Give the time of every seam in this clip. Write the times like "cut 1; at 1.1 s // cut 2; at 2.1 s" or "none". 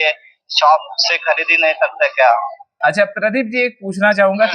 cut 1; at 2.8 s